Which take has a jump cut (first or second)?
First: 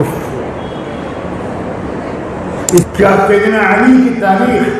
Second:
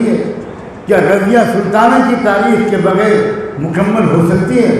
first